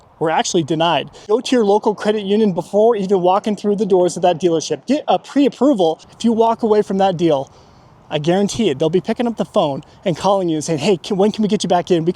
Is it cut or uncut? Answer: cut